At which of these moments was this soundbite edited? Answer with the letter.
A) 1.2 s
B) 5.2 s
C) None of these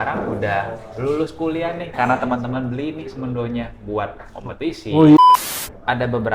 B